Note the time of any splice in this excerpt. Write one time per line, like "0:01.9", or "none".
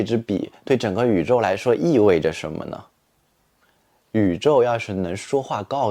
none